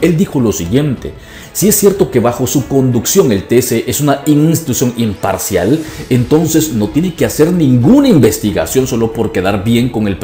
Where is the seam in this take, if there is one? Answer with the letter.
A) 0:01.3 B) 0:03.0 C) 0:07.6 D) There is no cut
D